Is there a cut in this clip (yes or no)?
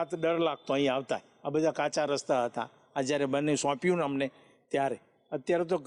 no